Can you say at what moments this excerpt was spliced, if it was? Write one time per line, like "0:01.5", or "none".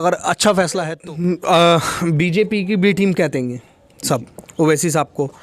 0:00.9